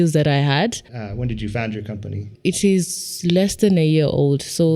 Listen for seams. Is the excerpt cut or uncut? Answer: cut